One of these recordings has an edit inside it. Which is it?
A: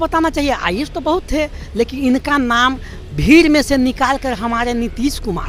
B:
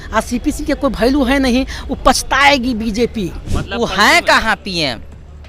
B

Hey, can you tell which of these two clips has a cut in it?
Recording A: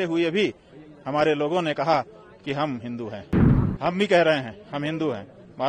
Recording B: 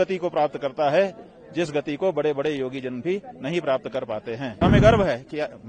B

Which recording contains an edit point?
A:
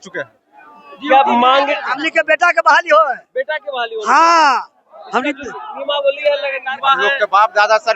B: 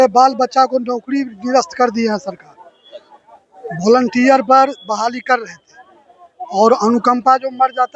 A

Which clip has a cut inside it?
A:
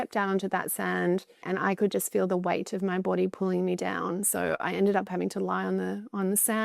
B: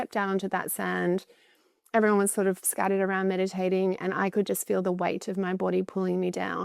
A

